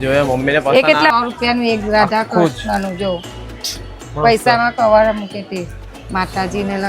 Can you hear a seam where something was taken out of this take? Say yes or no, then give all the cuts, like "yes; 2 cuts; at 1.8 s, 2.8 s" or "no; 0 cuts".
yes; 2 cuts; at 1.1 s, 5.9 s